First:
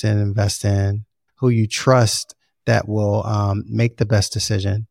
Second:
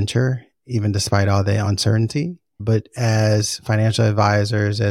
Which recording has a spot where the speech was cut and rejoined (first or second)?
first